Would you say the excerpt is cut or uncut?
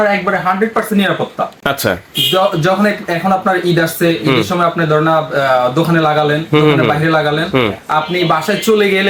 uncut